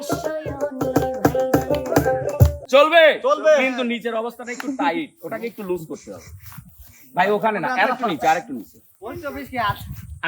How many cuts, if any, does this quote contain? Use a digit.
1